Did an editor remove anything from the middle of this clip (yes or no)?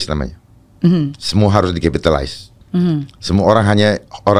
no